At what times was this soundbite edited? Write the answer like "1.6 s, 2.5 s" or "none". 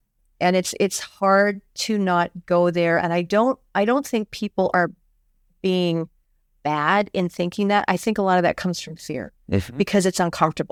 none